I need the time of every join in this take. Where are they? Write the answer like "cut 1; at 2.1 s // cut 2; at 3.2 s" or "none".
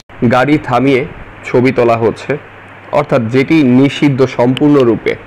none